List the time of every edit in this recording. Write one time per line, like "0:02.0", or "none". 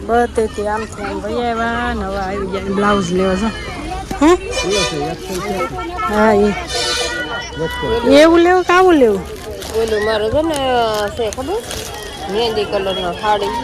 none